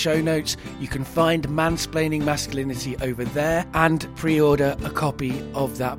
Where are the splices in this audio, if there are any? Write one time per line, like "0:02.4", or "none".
0:03.9